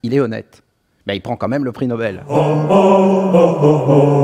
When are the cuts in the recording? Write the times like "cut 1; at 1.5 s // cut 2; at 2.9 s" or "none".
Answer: cut 1; at 2.2 s

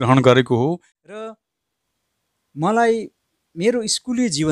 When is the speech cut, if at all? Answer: cut 1; at 1.2 s

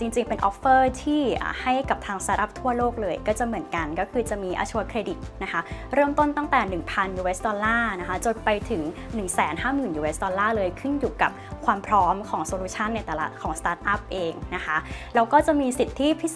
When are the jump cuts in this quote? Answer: none

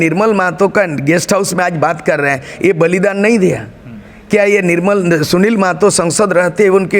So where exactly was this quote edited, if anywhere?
none

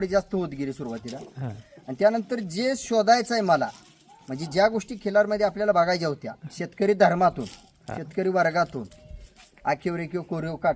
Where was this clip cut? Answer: none

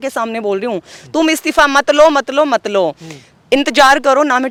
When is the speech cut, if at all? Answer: none

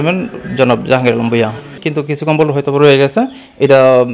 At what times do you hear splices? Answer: cut 1; at 1.8 s

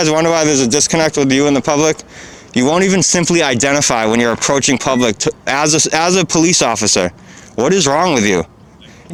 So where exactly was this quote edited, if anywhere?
none

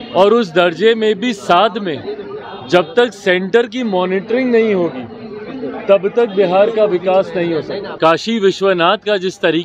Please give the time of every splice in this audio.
cut 1; at 7.8 s

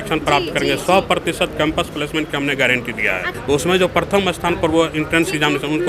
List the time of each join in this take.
cut 1; at 3.3 s

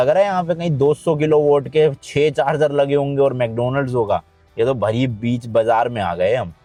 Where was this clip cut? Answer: none

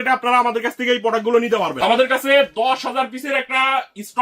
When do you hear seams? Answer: cut 1; at 1.7 s

